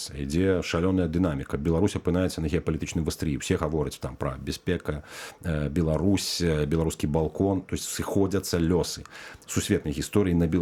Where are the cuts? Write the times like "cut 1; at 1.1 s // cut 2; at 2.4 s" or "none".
none